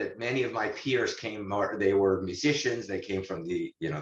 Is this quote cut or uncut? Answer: uncut